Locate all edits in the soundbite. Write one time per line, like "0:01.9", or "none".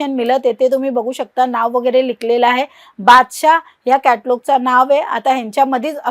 none